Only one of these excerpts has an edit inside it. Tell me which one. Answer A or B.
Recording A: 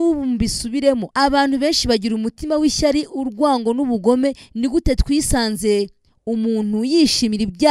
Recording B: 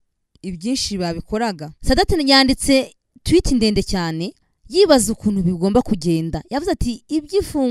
B